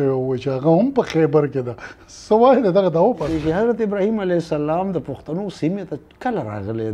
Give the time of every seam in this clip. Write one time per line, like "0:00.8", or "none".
0:03.4